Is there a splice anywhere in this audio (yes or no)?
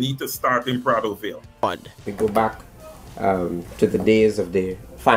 yes